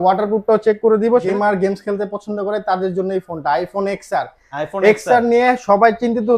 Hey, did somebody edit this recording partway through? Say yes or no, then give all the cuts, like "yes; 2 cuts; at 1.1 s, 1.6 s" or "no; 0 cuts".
yes; 1 cut; at 1.3 s